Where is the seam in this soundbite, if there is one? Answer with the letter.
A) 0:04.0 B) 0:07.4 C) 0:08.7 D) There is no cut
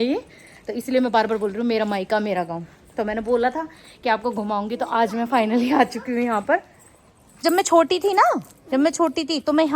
B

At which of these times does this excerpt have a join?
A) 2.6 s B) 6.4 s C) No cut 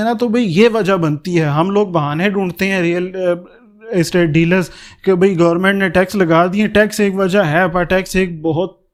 C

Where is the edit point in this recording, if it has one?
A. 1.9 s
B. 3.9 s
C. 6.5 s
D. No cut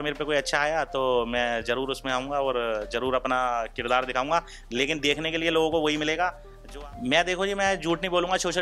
C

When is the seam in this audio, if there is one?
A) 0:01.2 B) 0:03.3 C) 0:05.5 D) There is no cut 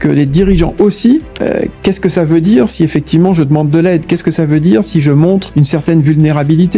C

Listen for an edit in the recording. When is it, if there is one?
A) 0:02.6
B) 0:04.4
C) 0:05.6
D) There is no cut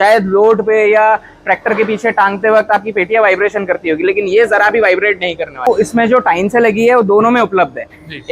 C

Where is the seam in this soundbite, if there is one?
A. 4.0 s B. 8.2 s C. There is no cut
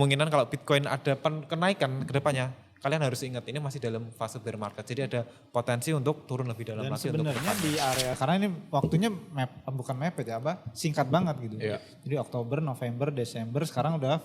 B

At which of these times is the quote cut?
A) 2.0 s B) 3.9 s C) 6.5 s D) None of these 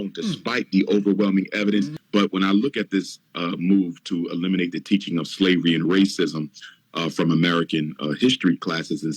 A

